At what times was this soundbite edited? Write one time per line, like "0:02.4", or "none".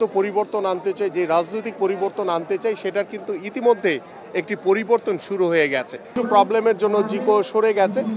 0:06.1